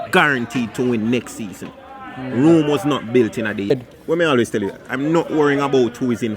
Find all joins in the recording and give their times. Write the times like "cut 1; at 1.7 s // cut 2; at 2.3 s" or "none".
cut 1; at 3.7 s